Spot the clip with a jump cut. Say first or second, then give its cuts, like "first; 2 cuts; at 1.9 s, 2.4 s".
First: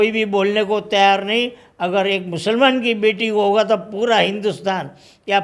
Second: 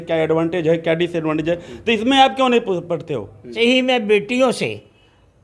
second; 1 cut; at 3.5 s